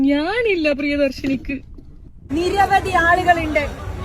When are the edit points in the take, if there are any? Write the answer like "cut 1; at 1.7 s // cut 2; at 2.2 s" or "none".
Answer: cut 1; at 2.2 s